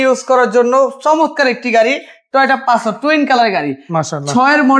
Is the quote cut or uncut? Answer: uncut